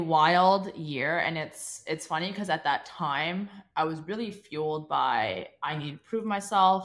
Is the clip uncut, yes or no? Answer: yes